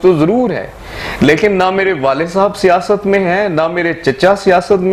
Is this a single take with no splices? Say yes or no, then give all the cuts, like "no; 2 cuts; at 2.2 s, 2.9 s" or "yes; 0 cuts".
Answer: yes; 0 cuts